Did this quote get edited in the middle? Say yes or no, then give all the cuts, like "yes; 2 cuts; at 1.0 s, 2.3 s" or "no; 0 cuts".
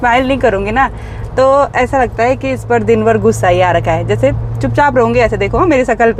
no; 0 cuts